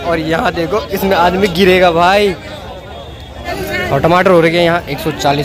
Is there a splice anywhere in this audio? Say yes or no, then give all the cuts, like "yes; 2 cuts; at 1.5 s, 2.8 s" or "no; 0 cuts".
yes; 1 cut; at 3.5 s